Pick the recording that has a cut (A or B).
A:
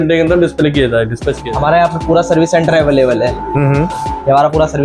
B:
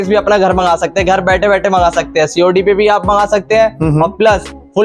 A